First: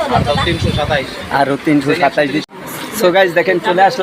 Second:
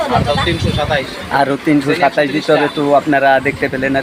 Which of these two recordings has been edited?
first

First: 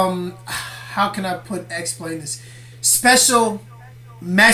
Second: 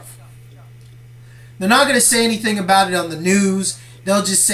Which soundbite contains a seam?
second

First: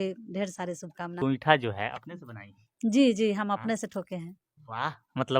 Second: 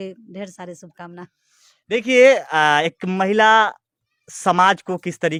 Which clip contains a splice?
first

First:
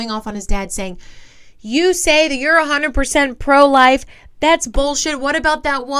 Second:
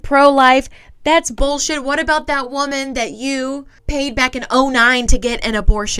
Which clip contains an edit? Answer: second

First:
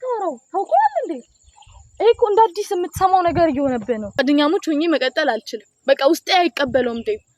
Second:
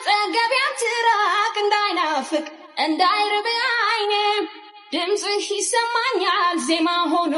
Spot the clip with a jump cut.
first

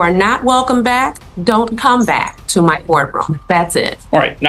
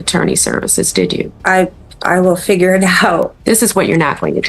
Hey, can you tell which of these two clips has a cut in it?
second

